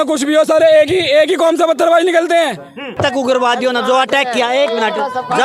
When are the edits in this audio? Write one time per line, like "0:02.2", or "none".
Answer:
0:02.9